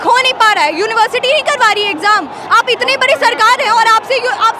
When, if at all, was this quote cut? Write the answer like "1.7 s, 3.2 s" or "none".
none